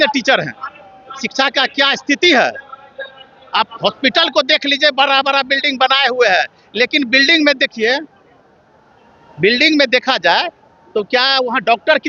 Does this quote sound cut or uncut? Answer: uncut